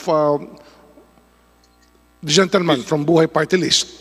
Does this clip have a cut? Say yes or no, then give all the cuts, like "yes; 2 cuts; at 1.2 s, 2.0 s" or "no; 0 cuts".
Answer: no; 0 cuts